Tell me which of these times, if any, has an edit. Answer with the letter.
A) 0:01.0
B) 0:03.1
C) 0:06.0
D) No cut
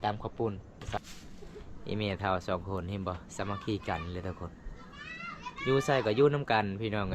A